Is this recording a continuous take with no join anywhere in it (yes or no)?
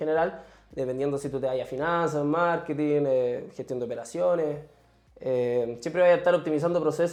yes